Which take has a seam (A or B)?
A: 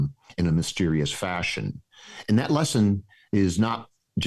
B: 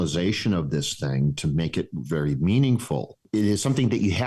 B